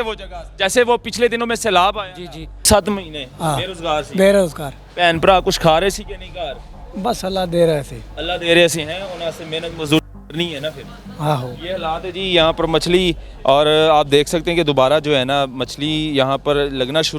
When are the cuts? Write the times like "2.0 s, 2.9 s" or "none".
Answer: 2.6 s

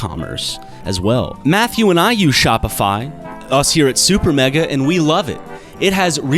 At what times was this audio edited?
1.4 s

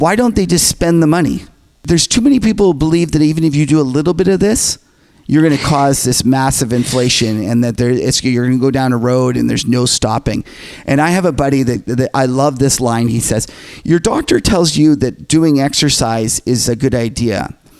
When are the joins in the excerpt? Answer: 1.6 s

